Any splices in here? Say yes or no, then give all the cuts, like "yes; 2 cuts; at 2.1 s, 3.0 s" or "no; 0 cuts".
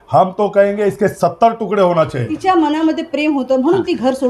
yes; 1 cut; at 2.3 s